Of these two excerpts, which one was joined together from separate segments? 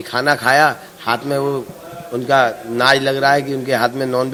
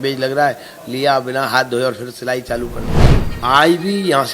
second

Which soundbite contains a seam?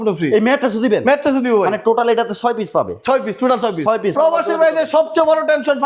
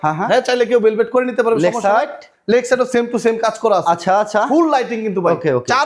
first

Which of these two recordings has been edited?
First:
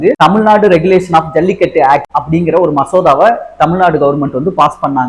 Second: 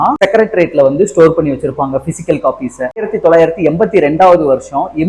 second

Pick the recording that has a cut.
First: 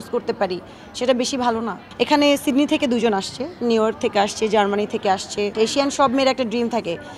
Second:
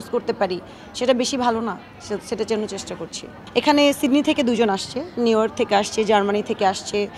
first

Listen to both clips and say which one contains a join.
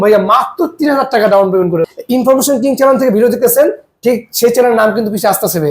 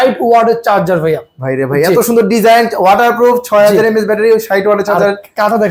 first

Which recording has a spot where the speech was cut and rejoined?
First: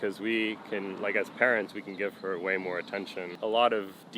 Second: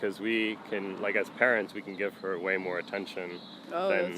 first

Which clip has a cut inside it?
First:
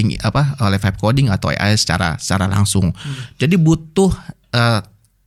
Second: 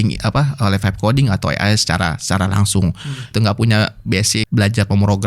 second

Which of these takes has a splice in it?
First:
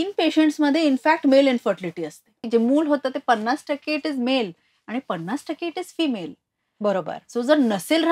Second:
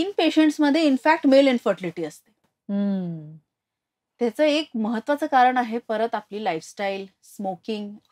first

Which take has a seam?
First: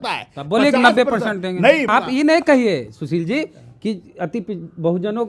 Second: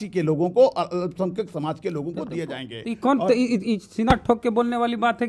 first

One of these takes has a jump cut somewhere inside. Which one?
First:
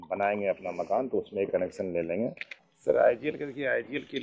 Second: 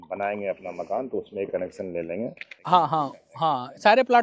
first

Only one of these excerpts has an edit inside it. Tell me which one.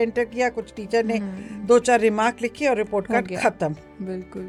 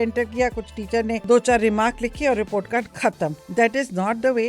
second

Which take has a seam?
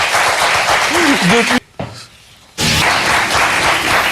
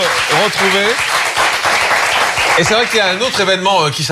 first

